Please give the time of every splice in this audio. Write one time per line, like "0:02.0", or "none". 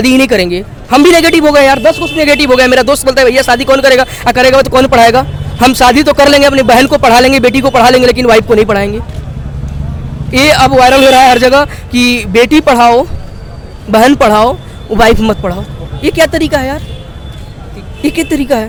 none